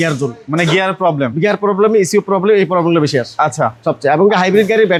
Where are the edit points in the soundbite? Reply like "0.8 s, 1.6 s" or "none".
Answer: none

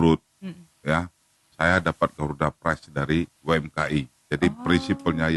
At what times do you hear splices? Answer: 3.4 s

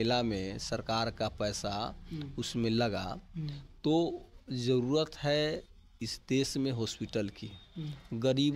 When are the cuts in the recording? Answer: none

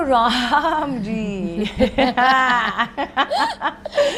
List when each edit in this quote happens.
none

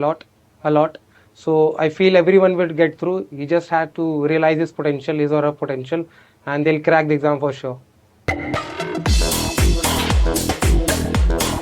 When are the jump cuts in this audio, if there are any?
8.1 s

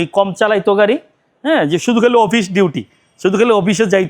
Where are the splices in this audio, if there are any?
none

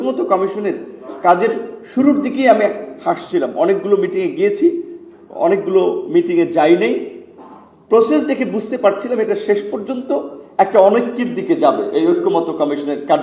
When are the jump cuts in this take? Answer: none

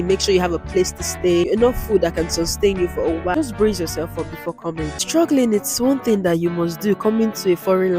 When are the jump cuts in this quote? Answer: 1.5 s, 3.3 s, 5.0 s

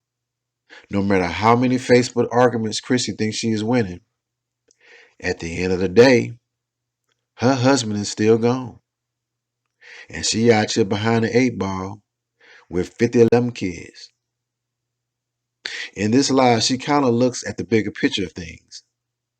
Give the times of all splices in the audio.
1.5 s

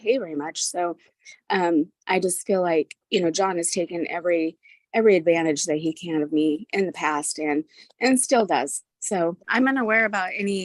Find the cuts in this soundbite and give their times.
9.4 s

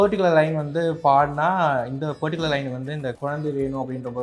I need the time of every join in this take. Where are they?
3.2 s

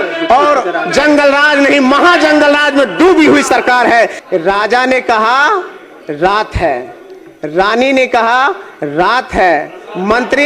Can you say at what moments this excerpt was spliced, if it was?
4.1 s

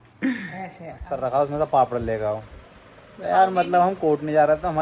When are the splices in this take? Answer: 1.1 s

